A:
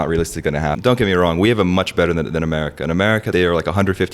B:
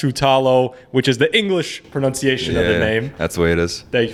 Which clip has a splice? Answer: A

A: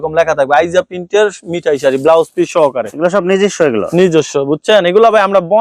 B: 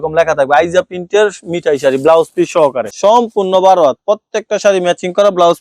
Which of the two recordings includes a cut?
B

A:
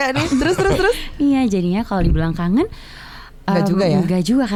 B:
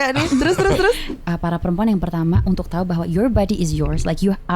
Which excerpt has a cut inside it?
B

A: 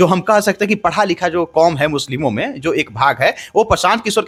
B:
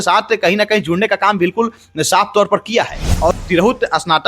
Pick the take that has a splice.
B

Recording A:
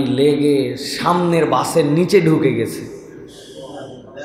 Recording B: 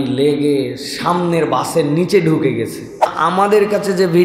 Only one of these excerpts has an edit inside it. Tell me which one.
B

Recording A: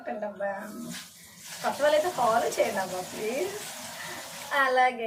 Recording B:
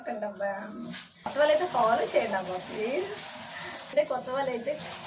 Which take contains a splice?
B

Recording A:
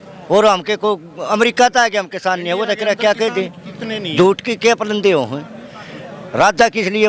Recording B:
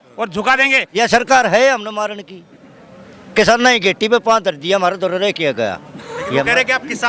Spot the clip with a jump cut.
B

